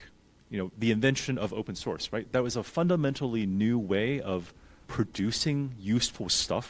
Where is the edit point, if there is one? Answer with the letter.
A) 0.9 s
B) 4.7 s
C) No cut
B